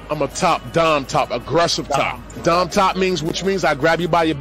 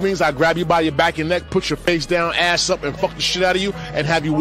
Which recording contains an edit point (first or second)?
first